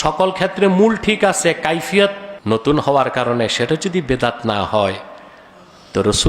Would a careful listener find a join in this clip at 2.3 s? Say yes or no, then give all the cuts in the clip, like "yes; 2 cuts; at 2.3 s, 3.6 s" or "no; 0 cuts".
yes; 1 cut; at 2.3 s